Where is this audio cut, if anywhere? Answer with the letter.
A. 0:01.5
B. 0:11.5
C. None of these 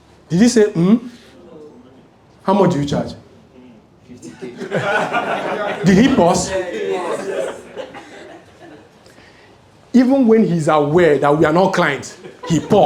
C